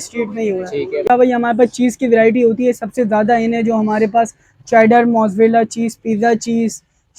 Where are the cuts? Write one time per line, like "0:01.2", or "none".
0:01.1